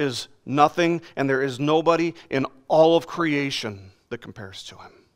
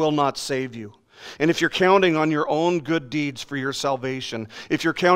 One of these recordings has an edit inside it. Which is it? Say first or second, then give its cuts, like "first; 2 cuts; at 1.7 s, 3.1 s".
first; 1 cut; at 3.9 s